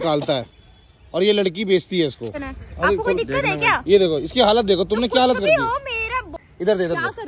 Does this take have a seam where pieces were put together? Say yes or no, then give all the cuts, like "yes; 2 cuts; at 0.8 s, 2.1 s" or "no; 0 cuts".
yes; 2 cuts; at 2.4 s, 6.3 s